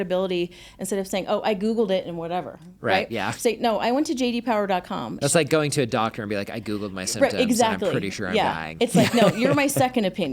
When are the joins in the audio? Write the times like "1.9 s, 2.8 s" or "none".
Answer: 5.2 s